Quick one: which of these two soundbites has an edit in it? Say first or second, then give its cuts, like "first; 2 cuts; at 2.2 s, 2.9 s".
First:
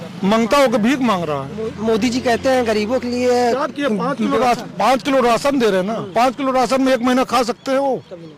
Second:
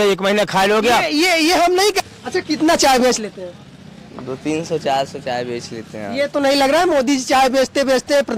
second; 1 cut; at 2.0 s